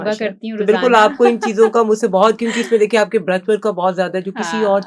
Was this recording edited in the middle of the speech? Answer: no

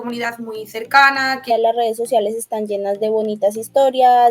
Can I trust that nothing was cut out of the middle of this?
no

